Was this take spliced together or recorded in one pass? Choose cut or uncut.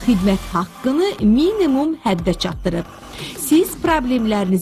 uncut